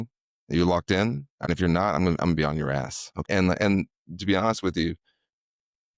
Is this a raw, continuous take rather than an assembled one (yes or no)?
no